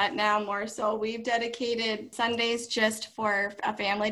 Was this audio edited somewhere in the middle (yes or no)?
yes